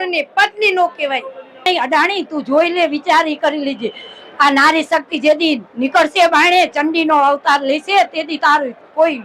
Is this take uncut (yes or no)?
no